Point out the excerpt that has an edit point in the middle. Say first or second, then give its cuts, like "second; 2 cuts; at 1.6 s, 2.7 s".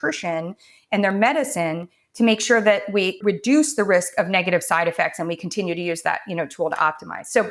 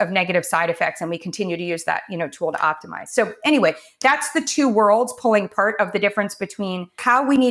first; 1 cut; at 3.2 s